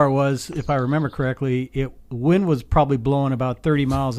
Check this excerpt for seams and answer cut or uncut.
uncut